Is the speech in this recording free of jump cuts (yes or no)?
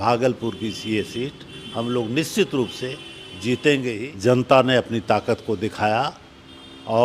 no